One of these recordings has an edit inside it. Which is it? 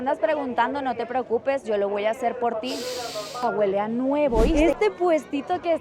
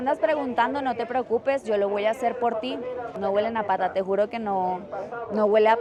first; 2 cuts; at 3.3 s, 4.6 s

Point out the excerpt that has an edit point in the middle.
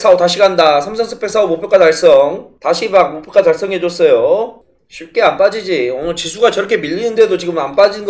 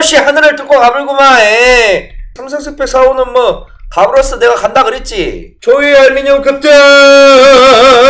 second; 1 cut; at 5.5 s

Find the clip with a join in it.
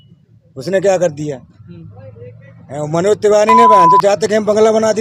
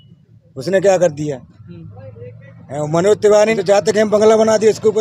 second; 1 cut; at 3.6 s

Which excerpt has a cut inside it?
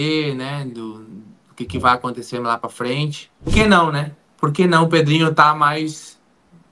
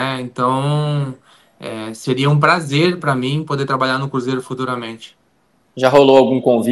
first; 1 cut; at 3.5 s

